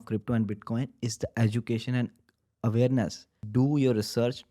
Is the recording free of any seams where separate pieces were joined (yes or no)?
no